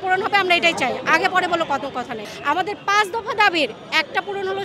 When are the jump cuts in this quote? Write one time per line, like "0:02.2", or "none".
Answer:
0:02.2